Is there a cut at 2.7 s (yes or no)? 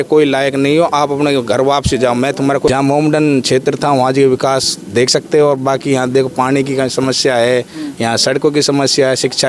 yes